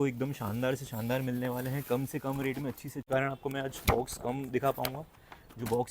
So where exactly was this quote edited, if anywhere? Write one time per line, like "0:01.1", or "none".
0:03.0